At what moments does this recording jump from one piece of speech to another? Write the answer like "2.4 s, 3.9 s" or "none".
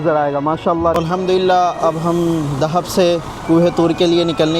1.0 s